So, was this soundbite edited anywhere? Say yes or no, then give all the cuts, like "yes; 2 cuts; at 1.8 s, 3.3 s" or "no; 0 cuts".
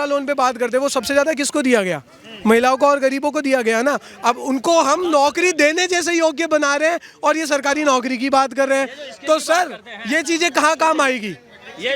no; 0 cuts